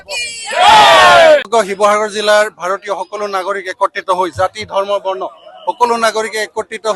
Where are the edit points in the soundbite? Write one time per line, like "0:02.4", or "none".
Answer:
0:01.5